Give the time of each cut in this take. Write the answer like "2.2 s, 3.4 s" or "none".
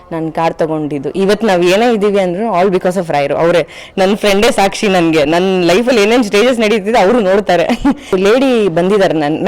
8.1 s